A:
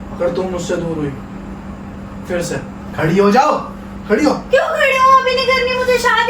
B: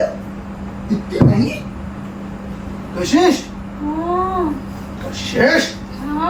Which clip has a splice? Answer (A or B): A